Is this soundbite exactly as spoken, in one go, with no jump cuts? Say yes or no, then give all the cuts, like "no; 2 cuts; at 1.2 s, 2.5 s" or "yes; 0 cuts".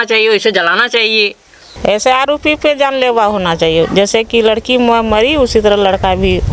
no; 1 cut; at 1.7 s